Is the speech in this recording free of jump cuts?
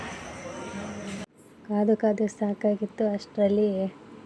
no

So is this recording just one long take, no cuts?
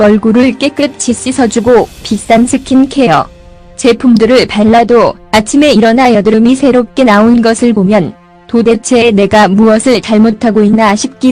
yes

